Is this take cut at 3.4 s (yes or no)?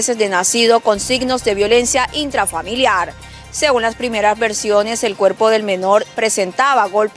no